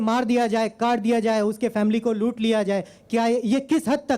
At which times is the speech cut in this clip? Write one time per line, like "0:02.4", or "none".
none

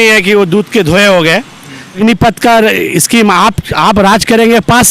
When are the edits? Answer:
0:02.0

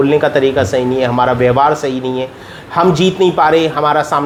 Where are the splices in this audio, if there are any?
none

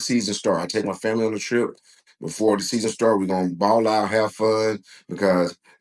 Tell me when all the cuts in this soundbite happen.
none

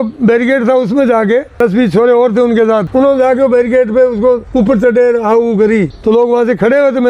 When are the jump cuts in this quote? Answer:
0:01.5
0:02.9
0:04.5
0:05.9

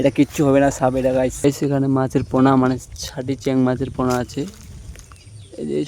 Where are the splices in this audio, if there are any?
0:01.3

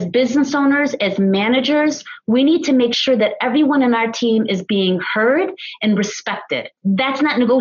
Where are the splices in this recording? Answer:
0:06.7

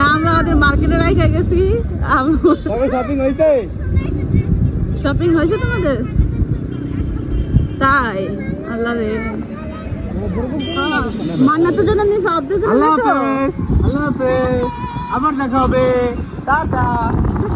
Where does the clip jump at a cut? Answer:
none

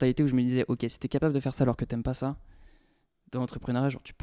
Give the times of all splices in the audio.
none

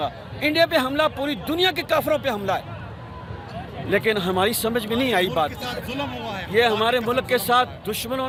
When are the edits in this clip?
none

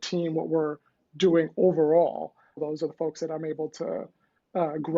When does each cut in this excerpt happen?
0:02.6

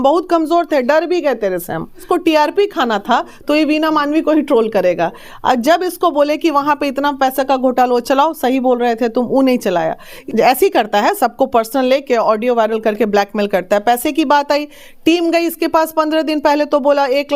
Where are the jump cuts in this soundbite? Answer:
0:02.0
0:10.1

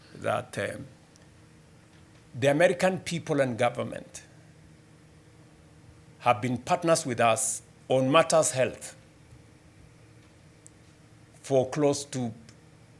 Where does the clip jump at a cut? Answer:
none

